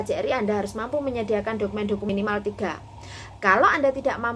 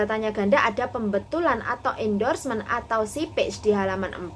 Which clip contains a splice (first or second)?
first